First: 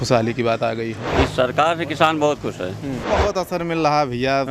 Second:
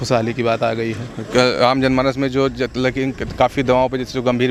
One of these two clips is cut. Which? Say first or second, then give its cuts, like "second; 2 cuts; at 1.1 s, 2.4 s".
first; 2 cuts; at 1.0 s, 3.1 s